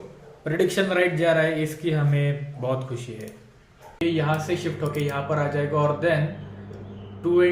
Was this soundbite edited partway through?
yes; 1 cut; at 4.0 s

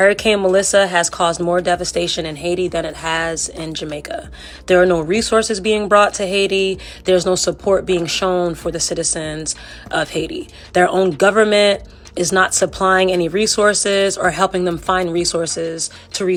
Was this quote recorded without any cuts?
yes; 0 cuts

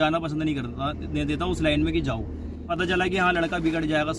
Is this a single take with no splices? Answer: no; 1 cut; at 2.6 s

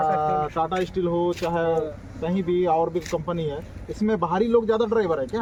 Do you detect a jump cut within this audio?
no; 0 cuts

